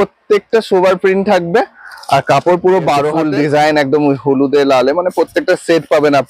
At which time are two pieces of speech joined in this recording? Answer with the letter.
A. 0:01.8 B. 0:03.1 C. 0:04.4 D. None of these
B